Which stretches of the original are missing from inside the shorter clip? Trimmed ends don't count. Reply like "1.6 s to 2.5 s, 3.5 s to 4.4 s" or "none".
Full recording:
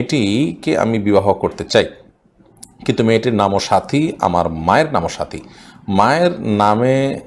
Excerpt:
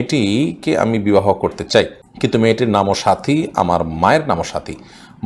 2.0 s to 2.7 s